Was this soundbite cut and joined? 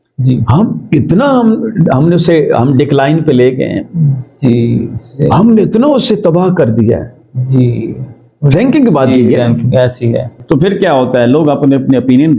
yes; 1 cut; at 10.4 s

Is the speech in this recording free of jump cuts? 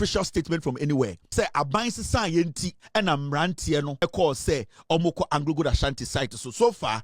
no; 3 cuts; at 1.2 s, 2.7 s, 4.0 s

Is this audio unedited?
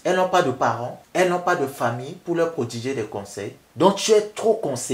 yes; 0 cuts

